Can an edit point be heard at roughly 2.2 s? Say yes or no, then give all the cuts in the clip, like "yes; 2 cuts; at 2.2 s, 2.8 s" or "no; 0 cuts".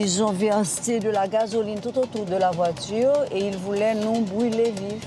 yes; 1 cut; at 2.2 s